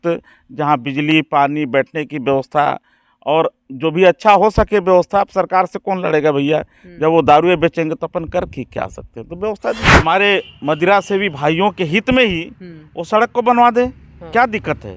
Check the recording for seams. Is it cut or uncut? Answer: cut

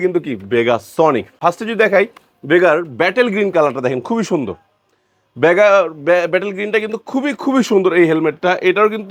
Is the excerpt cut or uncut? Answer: uncut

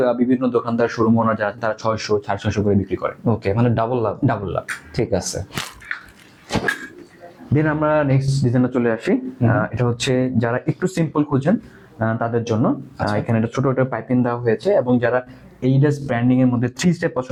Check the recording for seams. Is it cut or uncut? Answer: uncut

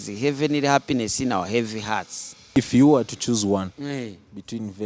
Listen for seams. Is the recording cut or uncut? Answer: cut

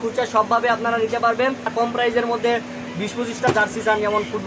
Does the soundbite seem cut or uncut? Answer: cut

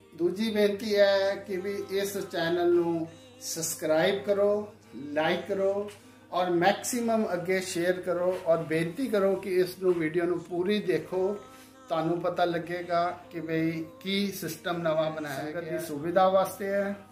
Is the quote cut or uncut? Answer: cut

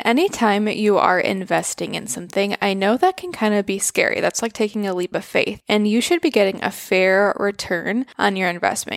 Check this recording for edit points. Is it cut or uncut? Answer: uncut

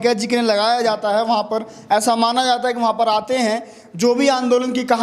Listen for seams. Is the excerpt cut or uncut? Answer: uncut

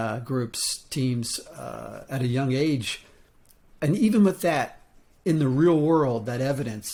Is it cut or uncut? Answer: uncut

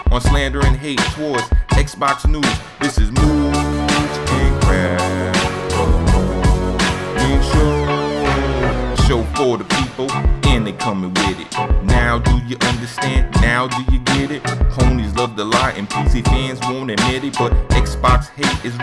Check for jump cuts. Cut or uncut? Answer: uncut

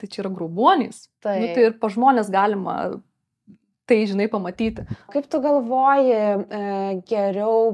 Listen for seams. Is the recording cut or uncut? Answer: cut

